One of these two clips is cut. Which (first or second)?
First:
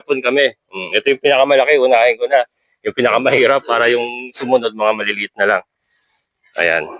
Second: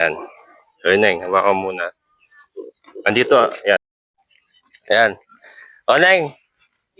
second